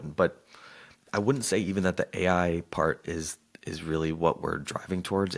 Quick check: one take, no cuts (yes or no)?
yes